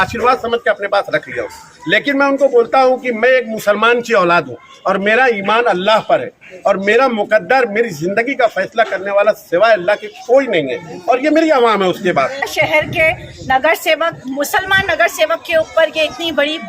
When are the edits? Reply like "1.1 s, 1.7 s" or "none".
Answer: 12.5 s

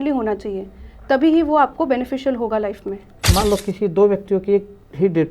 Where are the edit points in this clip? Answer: 3.2 s

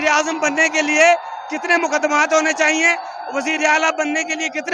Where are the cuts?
none

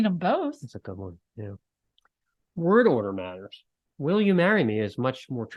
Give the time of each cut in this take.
none

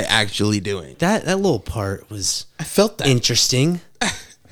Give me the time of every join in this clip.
1.0 s

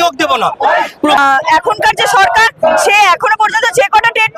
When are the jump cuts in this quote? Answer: 1.2 s

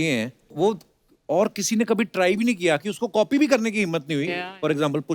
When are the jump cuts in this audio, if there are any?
none

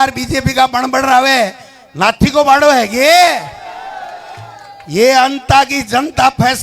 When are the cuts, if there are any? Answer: none

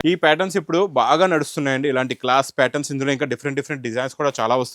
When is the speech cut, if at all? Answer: none

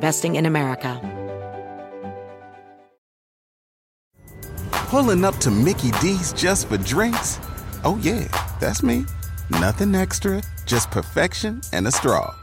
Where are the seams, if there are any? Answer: 1.0 s

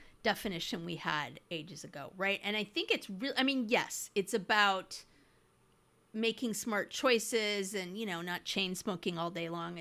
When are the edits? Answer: none

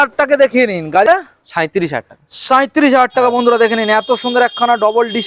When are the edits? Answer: 1.1 s

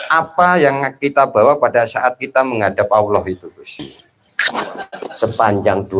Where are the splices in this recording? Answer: 3.8 s

